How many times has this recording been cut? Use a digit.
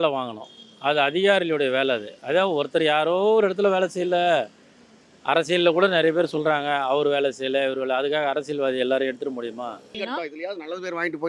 1